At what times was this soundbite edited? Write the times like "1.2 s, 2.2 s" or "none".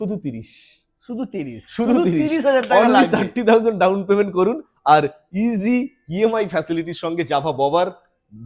none